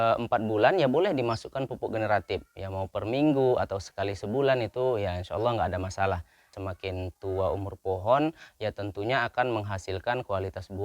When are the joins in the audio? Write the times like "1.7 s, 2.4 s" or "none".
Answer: 6.6 s

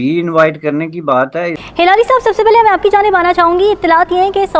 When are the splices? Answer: 1.6 s

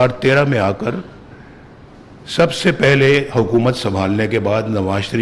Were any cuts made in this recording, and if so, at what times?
none

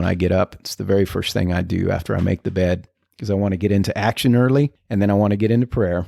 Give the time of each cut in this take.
4.8 s

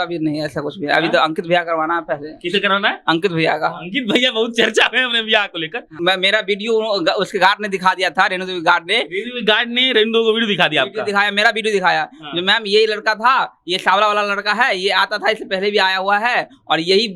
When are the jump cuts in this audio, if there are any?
6.0 s

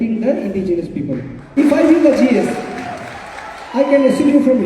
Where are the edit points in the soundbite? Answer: 1.5 s

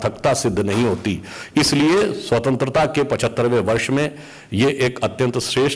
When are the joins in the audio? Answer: none

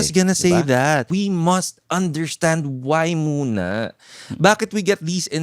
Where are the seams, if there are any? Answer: 1.1 s

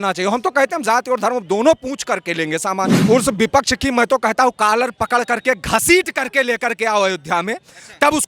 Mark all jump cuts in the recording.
3.0 s

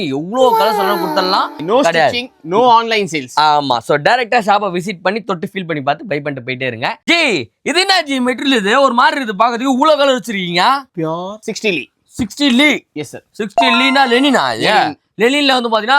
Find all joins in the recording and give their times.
1.6 s, 7.0 s

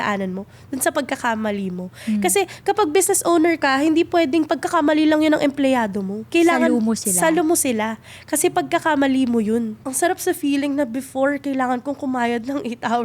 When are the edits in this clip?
9.8 s

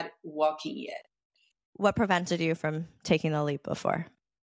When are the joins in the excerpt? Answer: 1.6 s

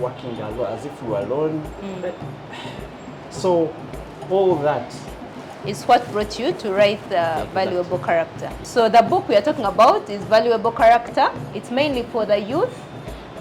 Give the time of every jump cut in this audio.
8.5 s, 11.5 s

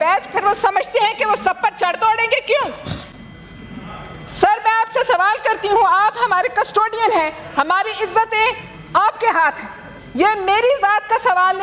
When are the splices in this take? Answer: none

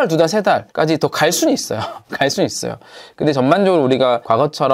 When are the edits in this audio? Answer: none

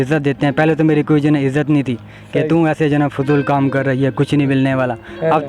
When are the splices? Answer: none

